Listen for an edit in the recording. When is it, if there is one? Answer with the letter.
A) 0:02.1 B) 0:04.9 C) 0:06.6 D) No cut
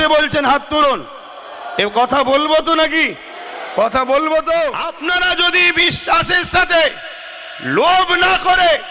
B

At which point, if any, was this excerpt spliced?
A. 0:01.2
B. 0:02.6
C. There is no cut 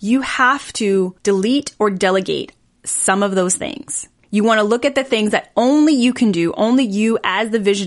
A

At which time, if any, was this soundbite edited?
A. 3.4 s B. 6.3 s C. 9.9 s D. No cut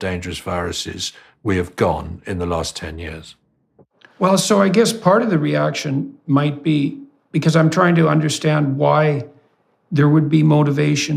D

